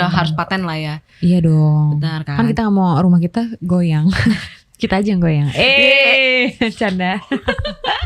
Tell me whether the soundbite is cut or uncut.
uncut